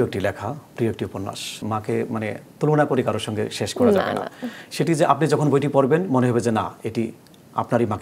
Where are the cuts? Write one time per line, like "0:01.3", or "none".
0:01.6